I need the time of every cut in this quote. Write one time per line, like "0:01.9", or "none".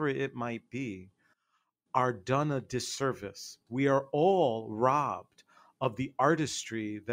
0:03.6